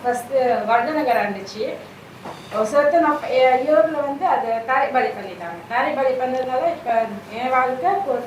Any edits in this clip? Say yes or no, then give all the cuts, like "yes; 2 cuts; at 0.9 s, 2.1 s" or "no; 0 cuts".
no; 0 cuts